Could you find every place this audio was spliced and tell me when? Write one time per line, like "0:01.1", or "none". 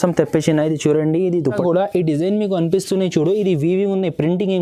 0:01.5